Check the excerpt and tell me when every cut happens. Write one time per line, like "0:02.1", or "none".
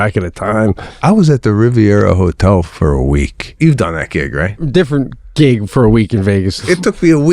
0:01.0
0:03.6
0:04.6
0:06.6